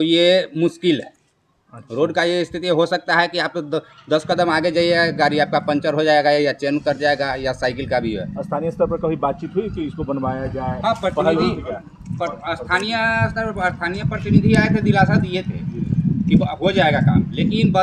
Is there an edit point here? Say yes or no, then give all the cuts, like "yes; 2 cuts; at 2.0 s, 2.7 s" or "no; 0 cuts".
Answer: no; 0 cuts